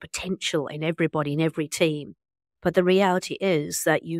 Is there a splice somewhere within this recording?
no; 0 cuts

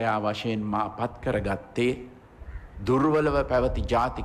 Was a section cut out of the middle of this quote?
no; 0 cuts

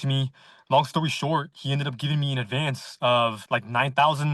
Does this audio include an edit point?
yes; 1 cut; at 3.4 s

